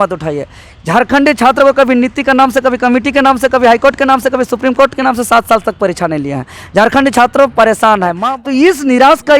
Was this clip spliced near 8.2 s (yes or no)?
yes